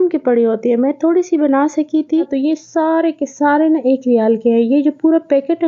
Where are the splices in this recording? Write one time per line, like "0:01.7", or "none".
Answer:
0:02.3